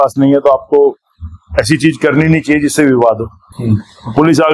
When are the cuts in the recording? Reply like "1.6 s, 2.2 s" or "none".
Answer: 3.5 s